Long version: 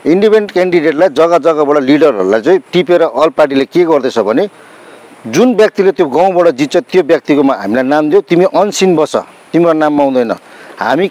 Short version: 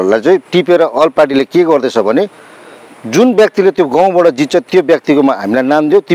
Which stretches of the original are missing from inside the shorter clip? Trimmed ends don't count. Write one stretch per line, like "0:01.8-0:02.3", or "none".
none

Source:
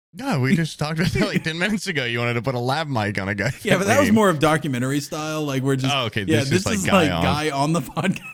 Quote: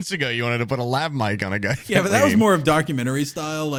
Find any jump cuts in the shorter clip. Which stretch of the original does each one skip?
none

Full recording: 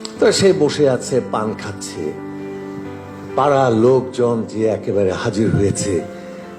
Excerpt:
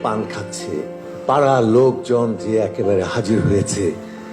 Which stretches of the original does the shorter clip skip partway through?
0:02.3-0:03.1

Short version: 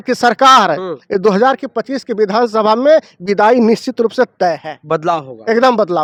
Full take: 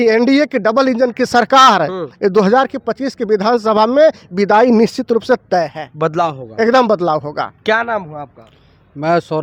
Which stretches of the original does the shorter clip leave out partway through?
none

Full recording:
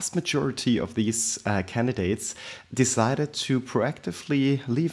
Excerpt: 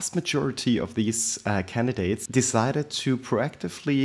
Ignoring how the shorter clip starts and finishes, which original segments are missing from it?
0:02.2-0:02.7

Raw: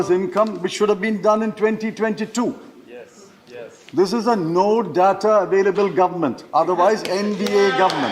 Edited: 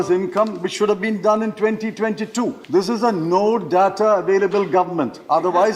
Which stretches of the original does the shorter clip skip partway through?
0:02.6-0:03.8

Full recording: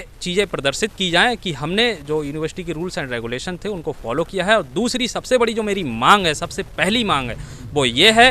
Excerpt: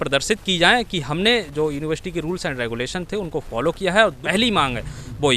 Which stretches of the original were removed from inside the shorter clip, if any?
0:04.7-0:06.7

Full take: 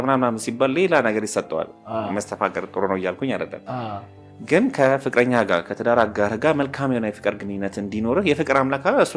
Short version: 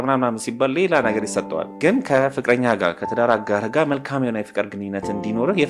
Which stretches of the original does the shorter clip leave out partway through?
0:01.7-0:04.4

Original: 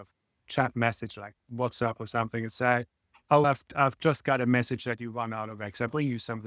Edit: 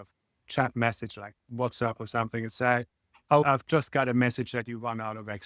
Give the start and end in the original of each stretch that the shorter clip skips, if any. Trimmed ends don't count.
0:03.4-0:03.8

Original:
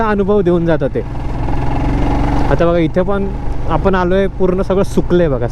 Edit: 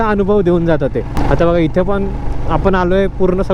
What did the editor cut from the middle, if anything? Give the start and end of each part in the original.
0:01.2-0:02.4

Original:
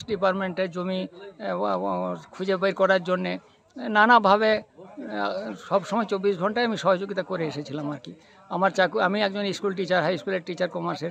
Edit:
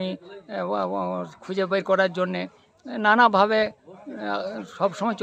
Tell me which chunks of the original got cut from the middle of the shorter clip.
none

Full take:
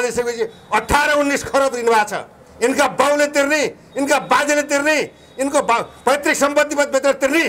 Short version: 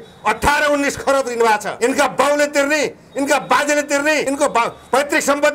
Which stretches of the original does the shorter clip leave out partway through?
0:02.2-0:02.5
0:05.0-0:05.4

